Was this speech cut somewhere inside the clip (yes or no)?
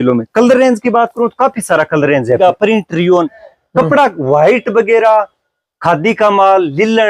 yes